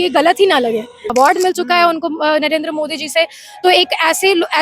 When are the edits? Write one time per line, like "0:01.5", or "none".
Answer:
0:01.0

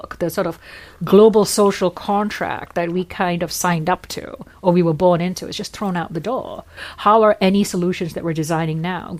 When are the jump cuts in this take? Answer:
0:06.8

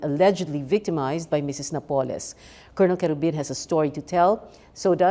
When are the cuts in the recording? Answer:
0:01.5

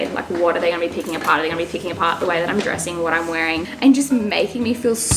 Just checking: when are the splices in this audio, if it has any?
0:03.6

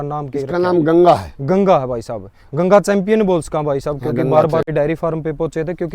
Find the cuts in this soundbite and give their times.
0:04.7

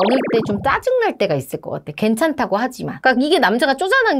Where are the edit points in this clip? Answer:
0:02.9

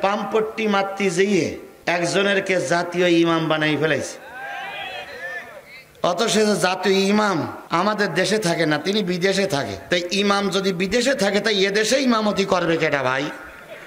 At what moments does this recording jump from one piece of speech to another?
0:09.8

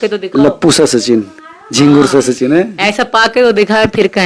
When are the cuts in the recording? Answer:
none

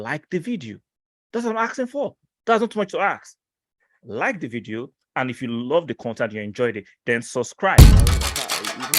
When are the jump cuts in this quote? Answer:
0:07.7

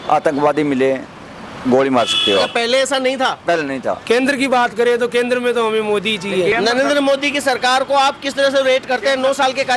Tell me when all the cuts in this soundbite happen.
0:04.0
0:06.5

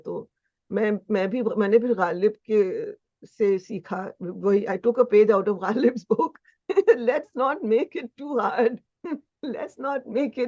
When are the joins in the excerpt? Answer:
none

